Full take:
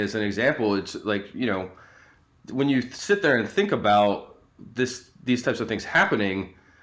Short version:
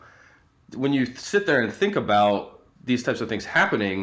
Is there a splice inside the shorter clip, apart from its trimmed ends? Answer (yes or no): yes